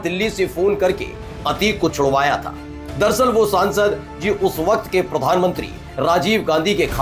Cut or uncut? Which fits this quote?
uncut